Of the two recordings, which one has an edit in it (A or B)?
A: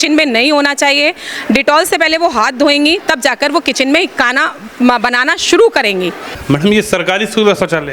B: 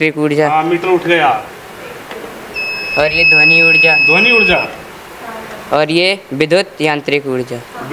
A